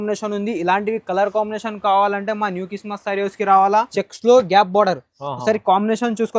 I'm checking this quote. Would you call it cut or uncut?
cut